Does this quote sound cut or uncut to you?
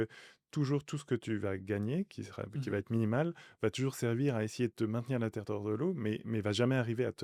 uncut